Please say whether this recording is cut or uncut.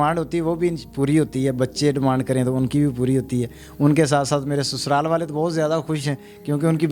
uncut